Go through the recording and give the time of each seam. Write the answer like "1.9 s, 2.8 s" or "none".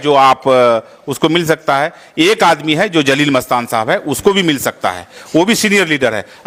none